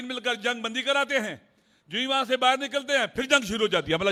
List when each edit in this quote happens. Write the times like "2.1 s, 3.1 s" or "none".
none